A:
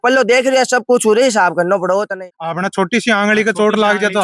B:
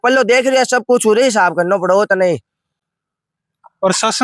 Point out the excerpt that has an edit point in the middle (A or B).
A